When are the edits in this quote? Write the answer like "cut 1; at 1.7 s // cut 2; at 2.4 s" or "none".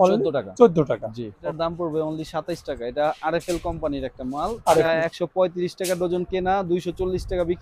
cut 1; at 1.5 s // cut 2; at 4.9 s